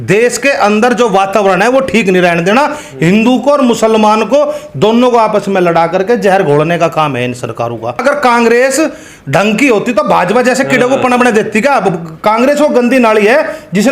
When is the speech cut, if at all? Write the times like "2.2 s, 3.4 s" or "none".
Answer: 8.0 s